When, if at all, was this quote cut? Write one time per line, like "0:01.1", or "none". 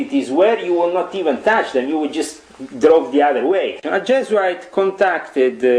0:03.8